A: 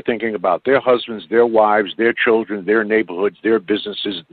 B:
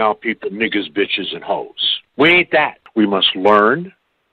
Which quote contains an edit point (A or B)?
B